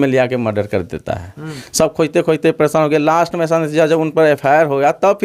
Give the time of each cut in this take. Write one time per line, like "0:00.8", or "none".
0:01.6

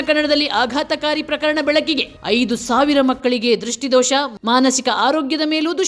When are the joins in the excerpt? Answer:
none

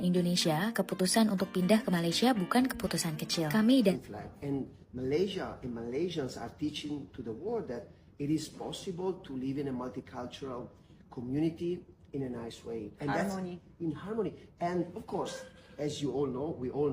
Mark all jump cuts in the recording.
0:04.0

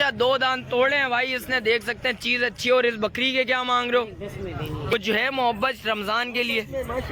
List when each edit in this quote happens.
0:04.9

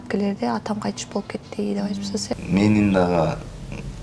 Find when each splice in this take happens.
0:02.3

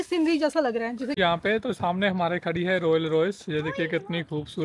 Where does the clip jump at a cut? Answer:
0:01.1

